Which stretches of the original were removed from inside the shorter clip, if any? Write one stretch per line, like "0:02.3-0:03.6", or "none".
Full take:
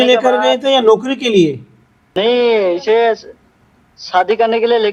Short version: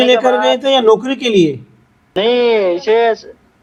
none